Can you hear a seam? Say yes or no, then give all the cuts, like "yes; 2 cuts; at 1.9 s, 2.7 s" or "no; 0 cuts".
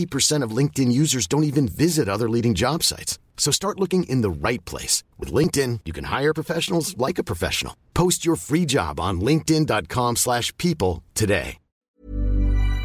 no; 0 cuts